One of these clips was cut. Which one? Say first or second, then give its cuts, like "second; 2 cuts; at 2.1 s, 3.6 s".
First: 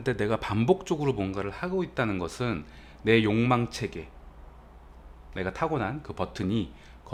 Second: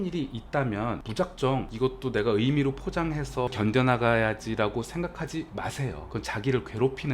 second; 3 cuts; at 1.0 s, 1.7 s, 3.5 s